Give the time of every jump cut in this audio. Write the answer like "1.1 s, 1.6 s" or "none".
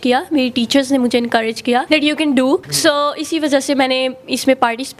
1.9 s, 2.7 s